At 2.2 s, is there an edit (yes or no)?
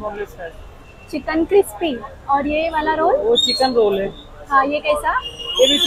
no